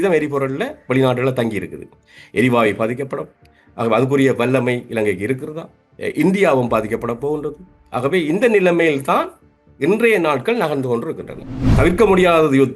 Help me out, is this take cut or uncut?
cut